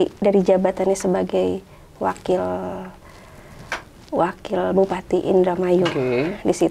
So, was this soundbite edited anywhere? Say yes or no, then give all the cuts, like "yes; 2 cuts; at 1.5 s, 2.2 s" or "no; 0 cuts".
no; 0 cuts